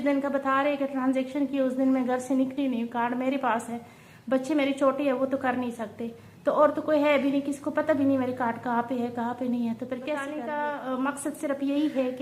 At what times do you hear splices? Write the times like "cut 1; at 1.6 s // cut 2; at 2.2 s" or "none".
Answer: cut 1; at 10.3 s